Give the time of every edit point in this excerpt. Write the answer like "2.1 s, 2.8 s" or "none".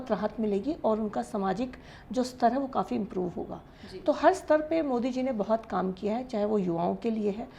none